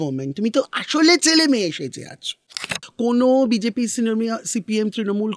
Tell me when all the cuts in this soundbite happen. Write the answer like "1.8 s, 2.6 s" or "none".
2.9 s